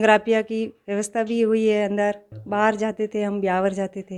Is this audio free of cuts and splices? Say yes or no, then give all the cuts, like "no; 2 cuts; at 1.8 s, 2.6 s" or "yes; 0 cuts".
yes; 0 cuts